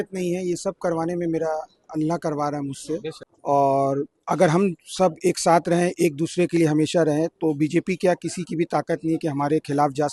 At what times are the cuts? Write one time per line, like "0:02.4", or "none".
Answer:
0:03.1